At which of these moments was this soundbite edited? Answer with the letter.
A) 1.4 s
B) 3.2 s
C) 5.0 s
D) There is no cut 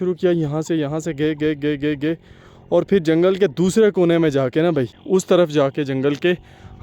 C